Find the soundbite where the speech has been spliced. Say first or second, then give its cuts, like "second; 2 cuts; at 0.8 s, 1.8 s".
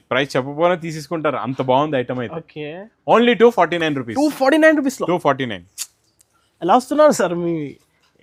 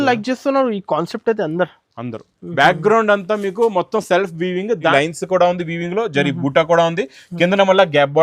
second; 1 cut; at 4.9 s